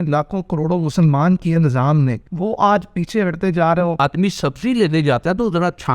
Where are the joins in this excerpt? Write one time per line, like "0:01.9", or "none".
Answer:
0:02.2
0:04.0

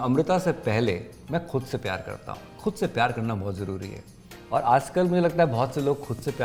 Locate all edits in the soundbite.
none

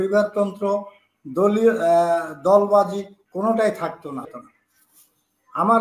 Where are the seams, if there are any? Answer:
0:04.3

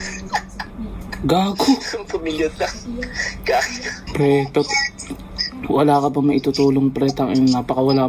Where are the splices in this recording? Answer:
0:04.0

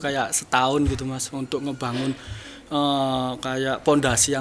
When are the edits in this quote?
none

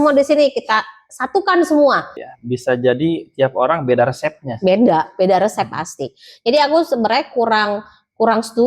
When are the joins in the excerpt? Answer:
0:02.2

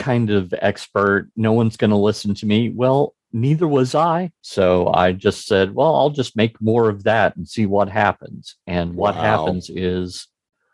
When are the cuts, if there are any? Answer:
0:04.4

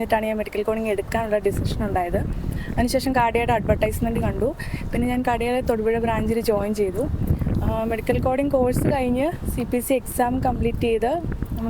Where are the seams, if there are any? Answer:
none

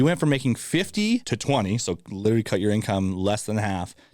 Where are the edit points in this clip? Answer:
0:01.3

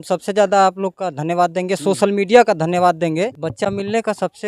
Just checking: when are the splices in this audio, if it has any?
0:03.4

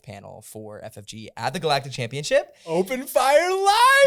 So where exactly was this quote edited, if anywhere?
none

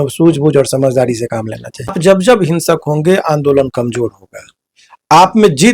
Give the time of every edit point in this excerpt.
0:01.9

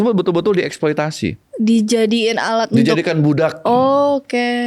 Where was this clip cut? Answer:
0:01.4

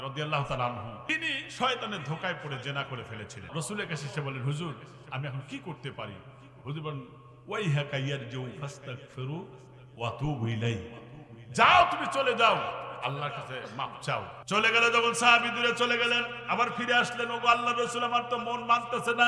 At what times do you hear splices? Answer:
0:01.0
0:03.5
0:14.3

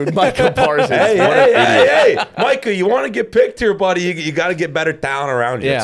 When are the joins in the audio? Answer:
none

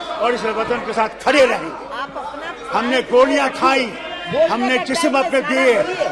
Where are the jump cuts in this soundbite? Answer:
none

